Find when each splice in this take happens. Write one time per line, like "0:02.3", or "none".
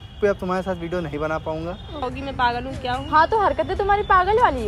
0:02.0